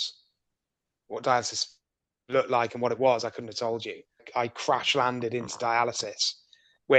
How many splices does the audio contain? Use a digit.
1